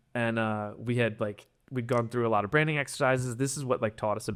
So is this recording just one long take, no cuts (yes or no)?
yes